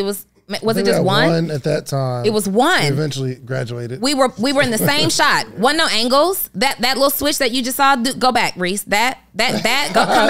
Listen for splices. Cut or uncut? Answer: uncut